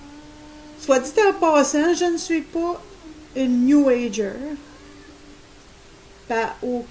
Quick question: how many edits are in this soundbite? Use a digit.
1